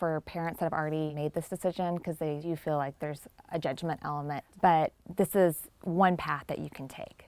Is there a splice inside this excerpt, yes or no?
yes